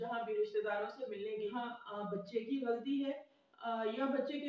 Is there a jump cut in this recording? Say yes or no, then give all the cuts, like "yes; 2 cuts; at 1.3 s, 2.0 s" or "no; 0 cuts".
yes; 1 cut; at 1.5 s